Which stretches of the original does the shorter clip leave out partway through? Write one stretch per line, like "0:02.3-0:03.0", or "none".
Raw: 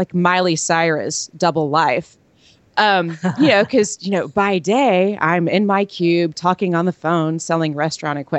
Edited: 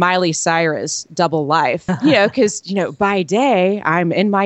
0:02.1-0:03.2